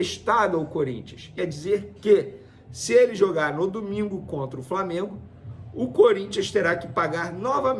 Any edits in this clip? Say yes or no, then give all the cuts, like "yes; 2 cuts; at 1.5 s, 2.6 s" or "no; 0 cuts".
yes; 1 cut; at 1.4 s